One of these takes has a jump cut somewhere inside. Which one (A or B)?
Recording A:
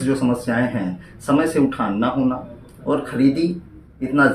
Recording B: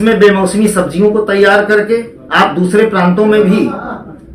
B